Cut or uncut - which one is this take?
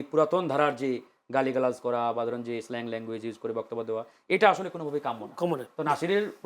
uncut